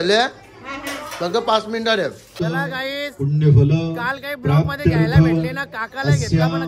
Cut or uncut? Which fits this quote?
cut